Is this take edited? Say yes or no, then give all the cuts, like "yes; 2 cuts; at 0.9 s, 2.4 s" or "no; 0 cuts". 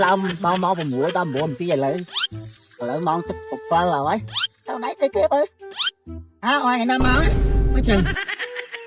no; 0 cuts